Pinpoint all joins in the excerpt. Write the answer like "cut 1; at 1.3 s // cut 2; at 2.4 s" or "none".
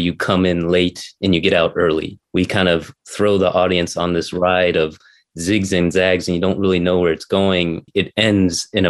cut 1; at 2.2 s // cut 2; at 7.9 s